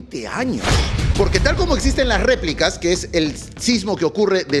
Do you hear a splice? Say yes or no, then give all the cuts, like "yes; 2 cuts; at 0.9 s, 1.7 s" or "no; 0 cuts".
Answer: yes; 1 cut; at 1.0 s